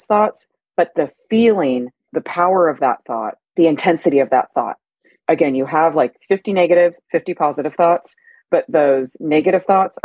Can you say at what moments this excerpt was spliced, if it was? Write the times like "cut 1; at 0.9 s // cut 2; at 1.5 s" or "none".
cut 1; at 2.1 s // cut 2; at 3.4 s // cut 3; at 5.2 s